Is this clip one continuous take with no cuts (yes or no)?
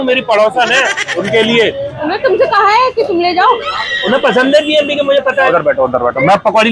no